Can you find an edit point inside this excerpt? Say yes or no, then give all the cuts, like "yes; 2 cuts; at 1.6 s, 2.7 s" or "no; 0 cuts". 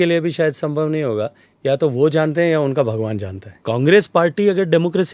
yes; 1 cut; at 3.6 s